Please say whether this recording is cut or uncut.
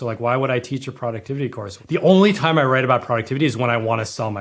cut